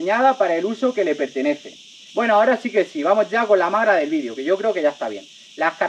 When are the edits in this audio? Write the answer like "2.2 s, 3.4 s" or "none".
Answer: none